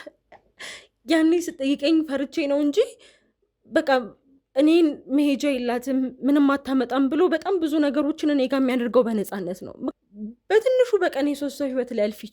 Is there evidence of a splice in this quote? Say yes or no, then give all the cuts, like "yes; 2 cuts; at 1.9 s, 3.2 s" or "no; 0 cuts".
yes; 1 cut; at 9.9 s